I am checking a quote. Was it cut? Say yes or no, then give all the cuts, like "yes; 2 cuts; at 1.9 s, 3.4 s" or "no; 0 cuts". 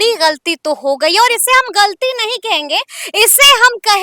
no; 0 cuts